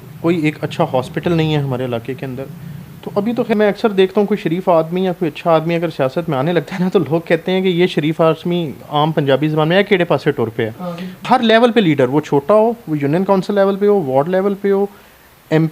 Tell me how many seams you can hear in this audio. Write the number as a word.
two